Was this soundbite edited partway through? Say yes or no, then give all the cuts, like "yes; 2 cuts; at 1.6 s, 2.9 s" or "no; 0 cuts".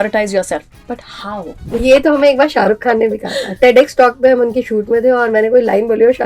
yes; 1 cut; at 1.8 s